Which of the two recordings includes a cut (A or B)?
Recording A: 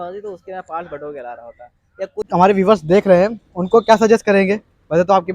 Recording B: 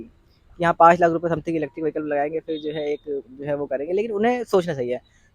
A